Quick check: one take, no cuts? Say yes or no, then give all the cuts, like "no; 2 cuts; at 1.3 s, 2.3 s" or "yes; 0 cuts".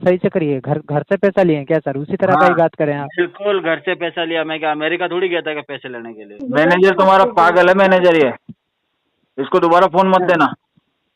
no; 1 cut; at 6.3 s